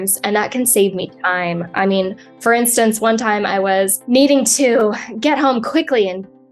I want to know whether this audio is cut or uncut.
uncut